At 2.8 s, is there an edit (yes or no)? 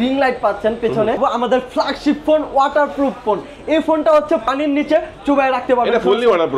no